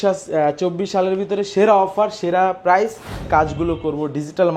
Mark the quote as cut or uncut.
cut